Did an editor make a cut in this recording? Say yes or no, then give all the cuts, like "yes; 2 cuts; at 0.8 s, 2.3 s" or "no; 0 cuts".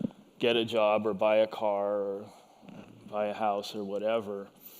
yes; 1 cut; at 1.3 s